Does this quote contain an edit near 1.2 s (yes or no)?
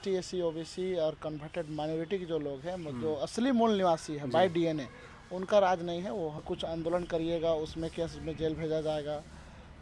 no